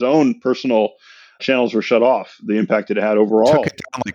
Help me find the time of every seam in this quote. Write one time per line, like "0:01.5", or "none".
0:01.4